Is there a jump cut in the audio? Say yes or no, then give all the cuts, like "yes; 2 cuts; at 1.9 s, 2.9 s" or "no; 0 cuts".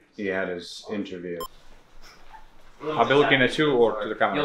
yes; 1 cut; at 1.4 s